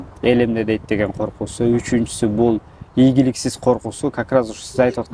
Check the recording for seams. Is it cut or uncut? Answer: uncut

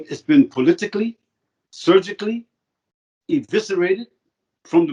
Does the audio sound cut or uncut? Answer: uncut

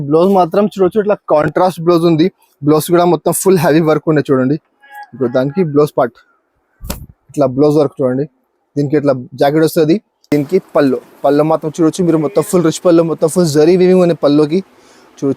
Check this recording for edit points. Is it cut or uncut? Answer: cut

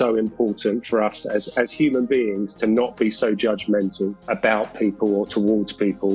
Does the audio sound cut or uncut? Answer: cut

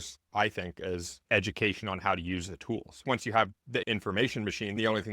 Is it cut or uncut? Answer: cut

